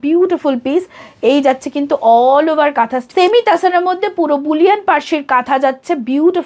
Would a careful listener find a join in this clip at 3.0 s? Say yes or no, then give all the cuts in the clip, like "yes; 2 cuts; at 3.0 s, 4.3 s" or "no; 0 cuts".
yes; 1 cut; at 3.0 s